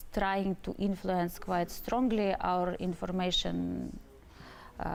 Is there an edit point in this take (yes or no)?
no